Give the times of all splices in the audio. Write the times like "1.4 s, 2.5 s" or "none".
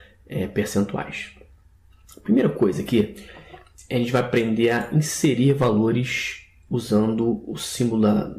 2.6 s